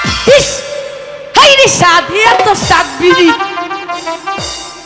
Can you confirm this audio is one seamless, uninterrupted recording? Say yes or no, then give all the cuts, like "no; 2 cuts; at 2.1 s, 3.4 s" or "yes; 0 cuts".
yes; 0 cuts